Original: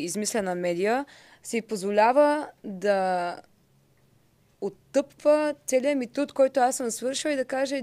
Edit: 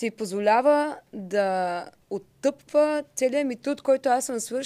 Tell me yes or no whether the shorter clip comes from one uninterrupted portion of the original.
no